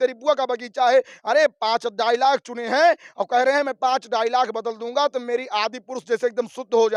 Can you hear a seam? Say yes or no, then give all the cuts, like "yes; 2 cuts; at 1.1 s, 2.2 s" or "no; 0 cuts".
no; 0 cuts